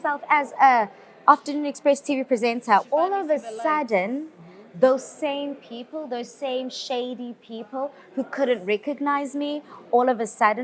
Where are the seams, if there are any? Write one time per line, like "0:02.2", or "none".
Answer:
0:02.8